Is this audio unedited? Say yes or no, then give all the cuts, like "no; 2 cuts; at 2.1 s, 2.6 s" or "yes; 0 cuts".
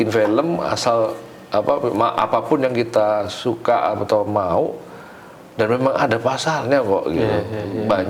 yes; 0 cuts